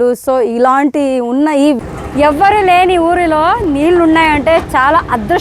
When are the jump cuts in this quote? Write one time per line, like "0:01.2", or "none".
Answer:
0:01.8